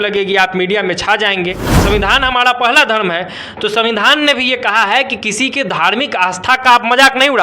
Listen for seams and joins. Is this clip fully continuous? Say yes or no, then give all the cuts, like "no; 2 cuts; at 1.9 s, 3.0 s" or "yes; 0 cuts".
no; 1 cut; at 1.7 s